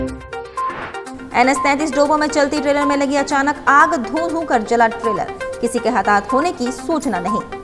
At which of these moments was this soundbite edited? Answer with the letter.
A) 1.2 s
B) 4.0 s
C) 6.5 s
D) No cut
A